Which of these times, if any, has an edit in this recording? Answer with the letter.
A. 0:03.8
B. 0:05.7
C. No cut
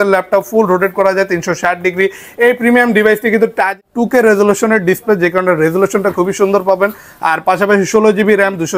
A